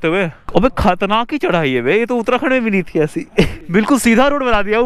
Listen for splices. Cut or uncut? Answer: cut